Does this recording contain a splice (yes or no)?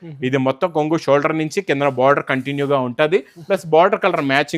no